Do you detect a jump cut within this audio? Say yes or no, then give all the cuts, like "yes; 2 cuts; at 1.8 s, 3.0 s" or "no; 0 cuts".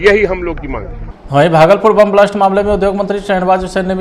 yes; 1 cut; at 1.1 s